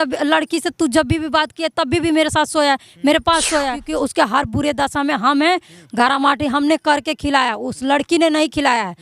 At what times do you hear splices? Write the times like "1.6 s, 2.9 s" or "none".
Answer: 3.8 s

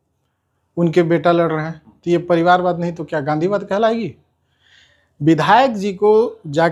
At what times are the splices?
none

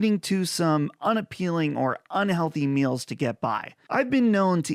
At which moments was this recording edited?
none

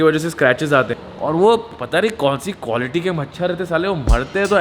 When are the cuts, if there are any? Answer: 1.0 s

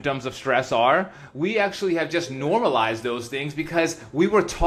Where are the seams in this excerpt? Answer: none

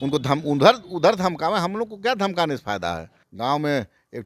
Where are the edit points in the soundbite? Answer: 3.2 s

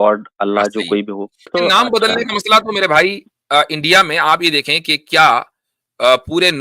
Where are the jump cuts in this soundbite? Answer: 1.3 s

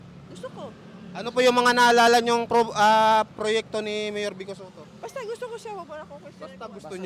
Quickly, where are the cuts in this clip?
none

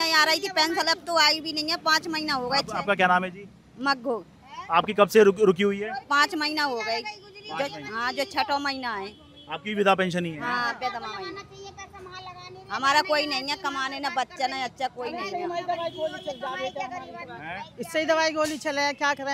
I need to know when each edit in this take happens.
none

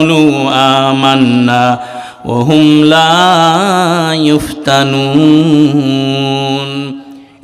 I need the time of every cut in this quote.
none

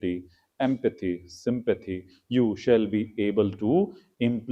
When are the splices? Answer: none

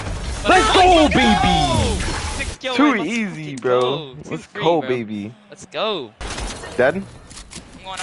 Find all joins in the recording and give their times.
6.2 s

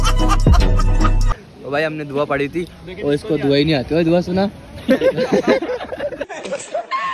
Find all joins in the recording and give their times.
1.4 s

